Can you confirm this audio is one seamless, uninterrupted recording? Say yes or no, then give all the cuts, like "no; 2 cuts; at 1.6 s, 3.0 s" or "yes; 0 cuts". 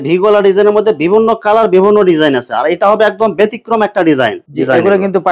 no; 1 cut; at 4.4 s